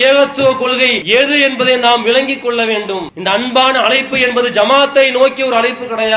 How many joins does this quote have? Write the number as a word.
two